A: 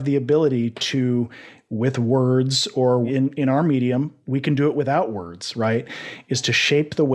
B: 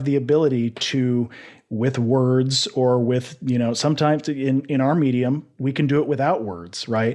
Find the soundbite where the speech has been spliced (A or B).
A